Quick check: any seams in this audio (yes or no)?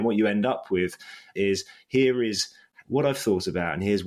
yes